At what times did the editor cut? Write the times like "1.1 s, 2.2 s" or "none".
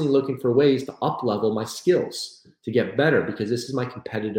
none